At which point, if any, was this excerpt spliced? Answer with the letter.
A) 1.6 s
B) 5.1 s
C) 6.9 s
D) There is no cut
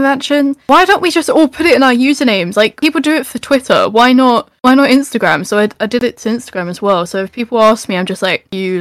D